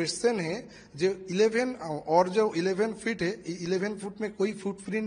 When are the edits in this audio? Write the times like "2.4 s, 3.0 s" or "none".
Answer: none